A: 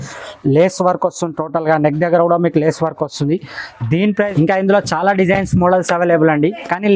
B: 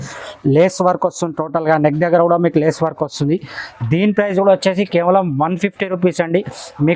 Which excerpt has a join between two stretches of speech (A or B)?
A